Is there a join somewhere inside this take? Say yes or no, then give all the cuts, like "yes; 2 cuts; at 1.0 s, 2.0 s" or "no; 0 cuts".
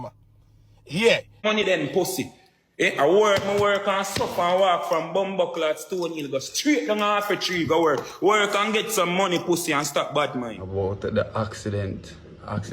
yes; 2 cuts; at 1.4 s, 10.6 s